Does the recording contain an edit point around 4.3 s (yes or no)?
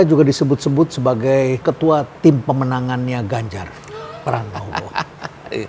no